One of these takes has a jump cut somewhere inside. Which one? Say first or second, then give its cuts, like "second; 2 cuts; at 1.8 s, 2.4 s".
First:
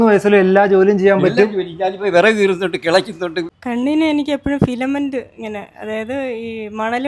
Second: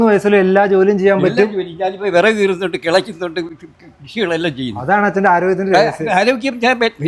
first; 1 cut; at 3.6 s